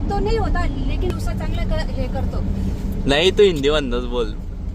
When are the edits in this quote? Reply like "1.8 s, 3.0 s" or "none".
1.1 s

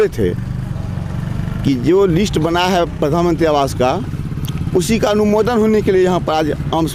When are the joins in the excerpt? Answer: none

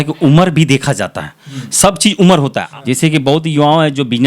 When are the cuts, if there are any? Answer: 2.5 s

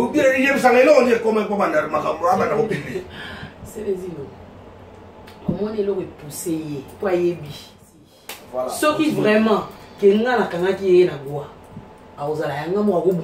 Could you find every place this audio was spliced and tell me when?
8.0 s

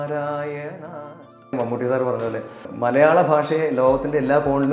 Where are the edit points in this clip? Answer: 1.5 s, 2.6 s

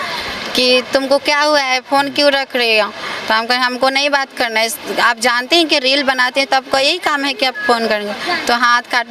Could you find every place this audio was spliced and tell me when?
none

